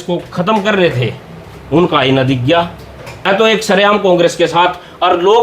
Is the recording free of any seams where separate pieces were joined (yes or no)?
no